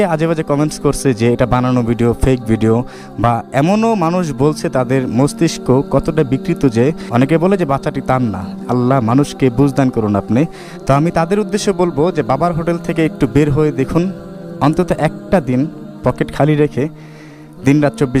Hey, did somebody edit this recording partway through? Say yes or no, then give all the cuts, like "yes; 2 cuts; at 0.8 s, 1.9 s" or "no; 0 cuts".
yes; 2 cuts; at 7.0 s, 10.7 s